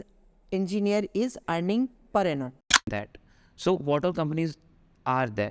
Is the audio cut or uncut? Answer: cut